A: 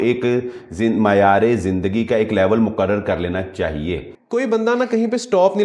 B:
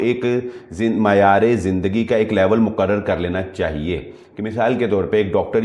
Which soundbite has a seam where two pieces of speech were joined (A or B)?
A